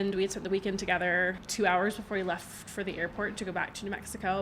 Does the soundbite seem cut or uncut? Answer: cut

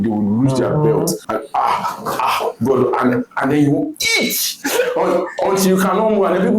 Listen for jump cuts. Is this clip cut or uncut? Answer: cut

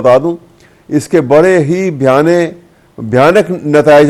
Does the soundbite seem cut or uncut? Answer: uncut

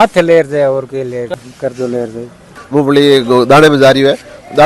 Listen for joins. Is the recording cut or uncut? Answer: cut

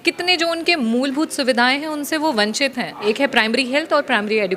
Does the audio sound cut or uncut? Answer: cut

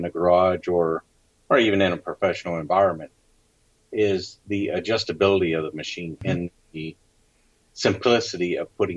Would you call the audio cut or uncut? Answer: cut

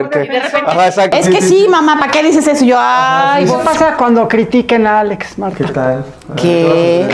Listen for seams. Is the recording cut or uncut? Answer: cut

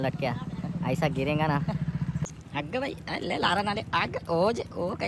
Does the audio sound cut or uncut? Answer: cut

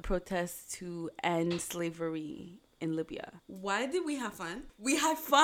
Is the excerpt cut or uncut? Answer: uncut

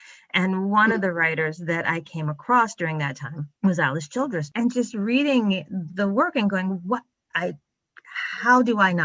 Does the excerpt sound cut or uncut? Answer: cut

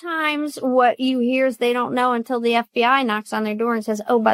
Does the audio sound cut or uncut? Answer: uncut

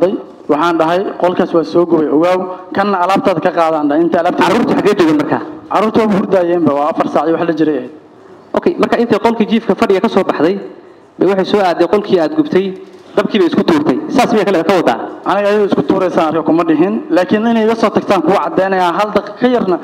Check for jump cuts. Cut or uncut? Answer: uncut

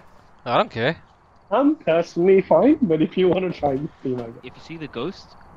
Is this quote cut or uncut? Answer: cut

